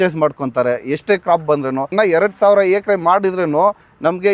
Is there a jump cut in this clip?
yes; 1 cut; at 1.9 s

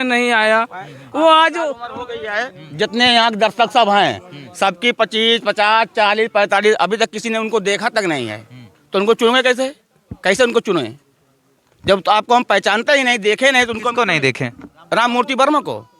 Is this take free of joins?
yes; 0 cuts

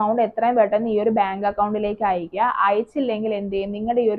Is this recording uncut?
yes; 0 cuts

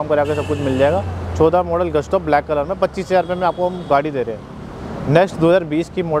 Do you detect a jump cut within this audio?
no; 0 cuts

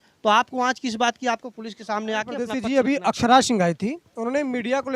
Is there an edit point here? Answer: yes; 1 cut; at 2.6 s

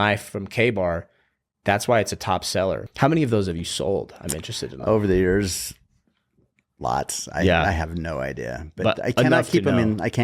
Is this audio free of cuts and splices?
no; 1 cut; at 2.8 s

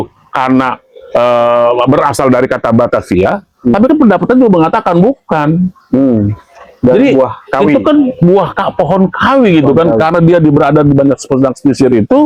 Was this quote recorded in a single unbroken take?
yes; 0 cuts

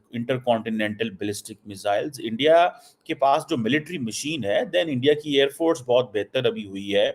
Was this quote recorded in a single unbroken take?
yes; 0 cuts

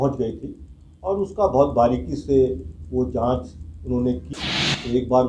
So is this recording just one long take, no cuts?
no; 1 cut; at 4.3 s

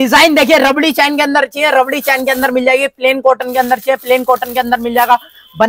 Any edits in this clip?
no; 0 cuts

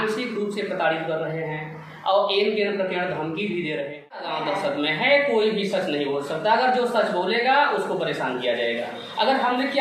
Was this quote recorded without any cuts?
no; 1 cut; at 4.3 s

